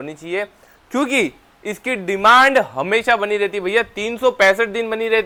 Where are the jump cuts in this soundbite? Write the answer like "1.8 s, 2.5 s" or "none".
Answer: none